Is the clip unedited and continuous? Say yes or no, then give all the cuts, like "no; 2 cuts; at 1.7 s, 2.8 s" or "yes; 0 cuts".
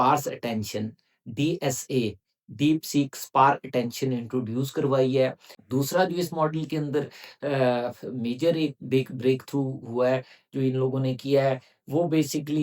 no; 1 cut; at 5.5 s